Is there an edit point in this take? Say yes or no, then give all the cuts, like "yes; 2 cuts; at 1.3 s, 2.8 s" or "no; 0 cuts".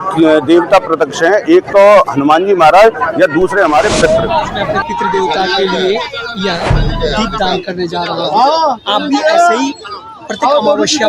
yes; 1 cut; at 4.7 s